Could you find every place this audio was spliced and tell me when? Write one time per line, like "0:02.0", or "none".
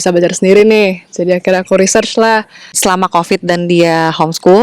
0:02.8

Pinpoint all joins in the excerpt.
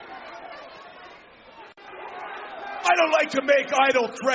0:01.9

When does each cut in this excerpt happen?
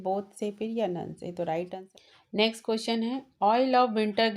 0:01.8

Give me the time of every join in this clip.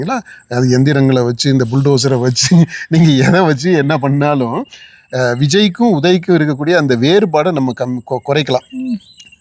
none

